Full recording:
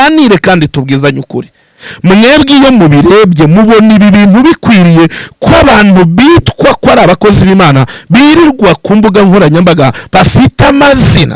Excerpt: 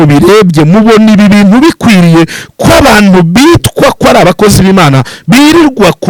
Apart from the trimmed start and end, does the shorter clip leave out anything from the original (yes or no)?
no